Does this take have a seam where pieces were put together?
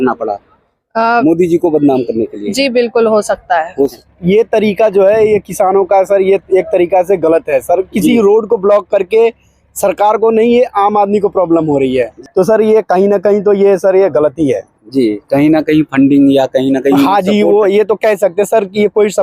yes; 2 cuts; at 4.1 s, 12.1 s

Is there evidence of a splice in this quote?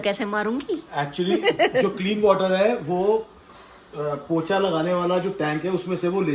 no; 0 cuts

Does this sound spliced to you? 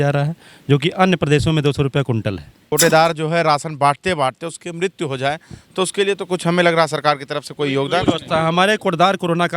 yes; 1 cut; at 2.6 s

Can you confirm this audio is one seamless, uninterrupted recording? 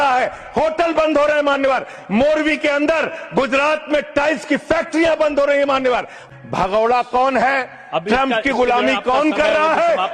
no; 1 cut; at 6.2 s

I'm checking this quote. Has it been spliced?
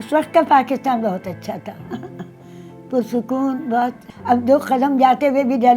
yes; 1 cut; at 4.1 s

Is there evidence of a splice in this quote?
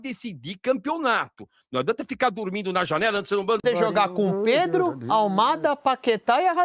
yes; 1 cut; at 3.6 s

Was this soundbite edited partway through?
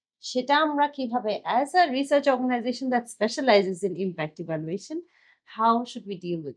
no; 0 cuts

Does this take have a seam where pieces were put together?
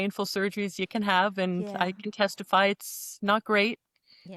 no; 0 cuts

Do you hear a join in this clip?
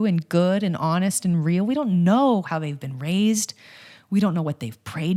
no; 0 cuts

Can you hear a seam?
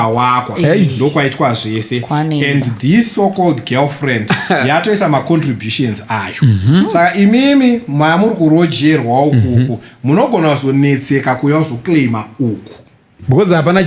no; 0 cuts

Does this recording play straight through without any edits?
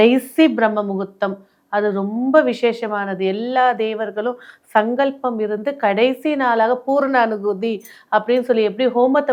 yes; 0 cuts

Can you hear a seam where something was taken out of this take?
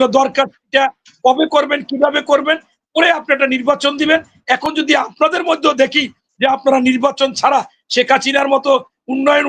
no; 0 cuts

